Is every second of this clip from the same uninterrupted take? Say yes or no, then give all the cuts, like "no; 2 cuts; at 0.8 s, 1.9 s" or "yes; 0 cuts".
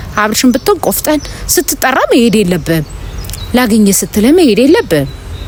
yes; 0 cuts